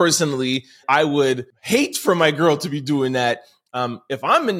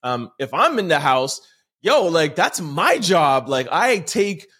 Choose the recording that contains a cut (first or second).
first